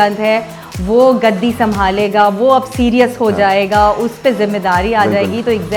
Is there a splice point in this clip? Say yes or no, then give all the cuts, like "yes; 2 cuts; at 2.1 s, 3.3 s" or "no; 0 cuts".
no; 0 cuts